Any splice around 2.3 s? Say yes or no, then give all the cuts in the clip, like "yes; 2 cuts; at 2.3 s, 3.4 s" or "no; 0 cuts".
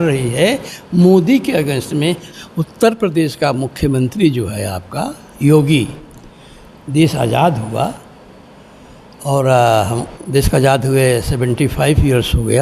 yes; 1 cut; at 2.3 s